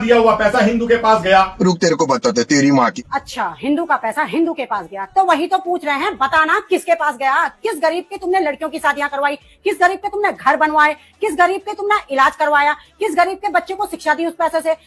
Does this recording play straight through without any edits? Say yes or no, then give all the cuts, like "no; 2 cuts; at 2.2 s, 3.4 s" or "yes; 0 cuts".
yes; 0 cuts